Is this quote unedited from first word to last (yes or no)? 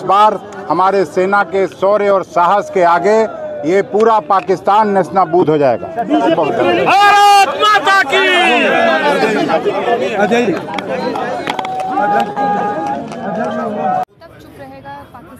yes